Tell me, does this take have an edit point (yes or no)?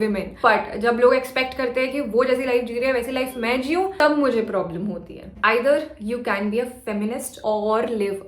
yes